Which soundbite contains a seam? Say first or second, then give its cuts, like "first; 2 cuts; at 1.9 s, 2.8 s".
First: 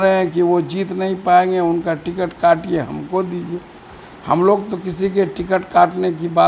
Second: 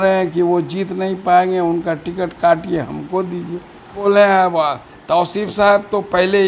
second; 1 cut; at 4.0 s